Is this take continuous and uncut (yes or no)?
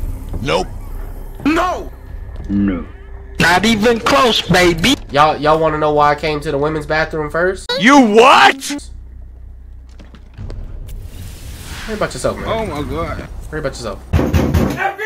yes